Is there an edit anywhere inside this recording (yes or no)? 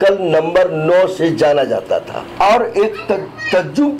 yes